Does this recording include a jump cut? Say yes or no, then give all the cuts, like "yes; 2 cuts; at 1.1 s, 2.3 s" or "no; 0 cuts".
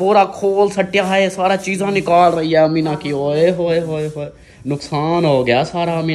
no; 0 cuts